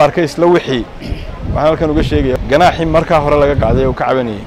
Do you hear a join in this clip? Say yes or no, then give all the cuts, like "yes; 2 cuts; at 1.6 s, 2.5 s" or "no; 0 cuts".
yes; 1 cut; at 2.3 s